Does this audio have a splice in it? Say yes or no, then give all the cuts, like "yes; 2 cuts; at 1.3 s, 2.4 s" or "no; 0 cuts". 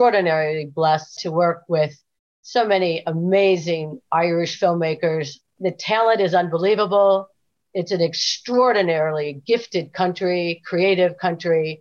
yes; 2 cuts; at 1.2 s, 5.4 s